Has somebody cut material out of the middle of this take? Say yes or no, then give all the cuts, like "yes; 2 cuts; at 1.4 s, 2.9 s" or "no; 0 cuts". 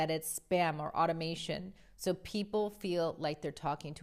no; 0 cuts